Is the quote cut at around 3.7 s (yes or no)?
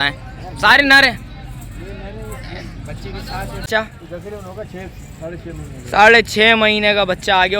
yes